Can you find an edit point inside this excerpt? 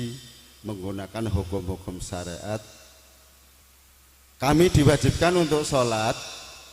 yes; 1 cut; at 3.7 s

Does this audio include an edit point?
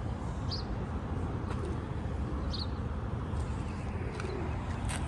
no; 0 cuts

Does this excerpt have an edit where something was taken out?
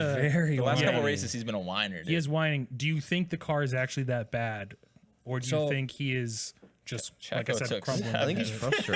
no; 0 cuts

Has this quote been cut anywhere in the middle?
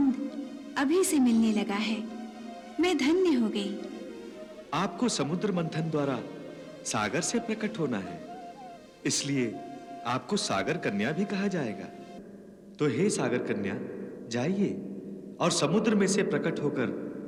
no; 0 cuts

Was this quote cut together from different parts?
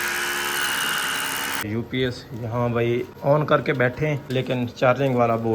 yes; 3 cuts; at 1.6 s, 3.1 s, 4.2 s

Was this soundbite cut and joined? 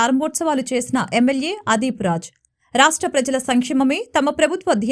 no; 0 cuts

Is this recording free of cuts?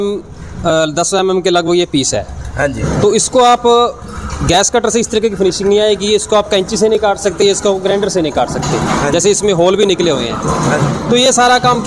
yes; 0 cuts

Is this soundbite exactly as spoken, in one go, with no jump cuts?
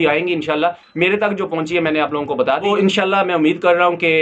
no; 1 cut; at 2.6 s

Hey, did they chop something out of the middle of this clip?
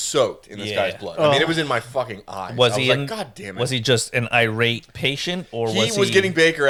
no; 0 cuts

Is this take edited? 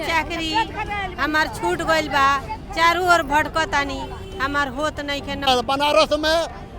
yes; 1 cut; at 5.5 s

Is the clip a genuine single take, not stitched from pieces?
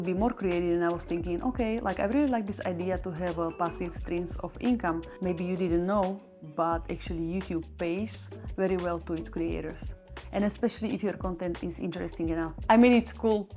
no; 2 cuts; at 5.1 s, 12.5 s

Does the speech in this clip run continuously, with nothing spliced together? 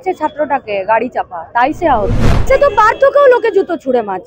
no; 1 cut; at 2.3 s

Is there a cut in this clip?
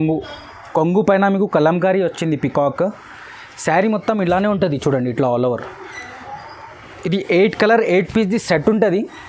no; 0 cuts

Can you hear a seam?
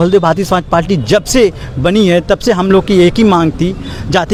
no; 0 cuts

